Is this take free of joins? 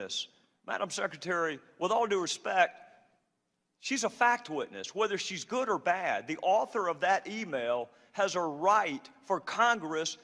yes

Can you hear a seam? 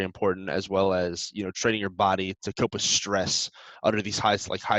no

